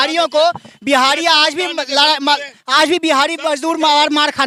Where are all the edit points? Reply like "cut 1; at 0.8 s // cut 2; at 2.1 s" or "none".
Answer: none